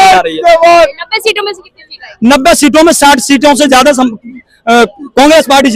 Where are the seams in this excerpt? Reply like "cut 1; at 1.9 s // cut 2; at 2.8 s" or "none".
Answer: none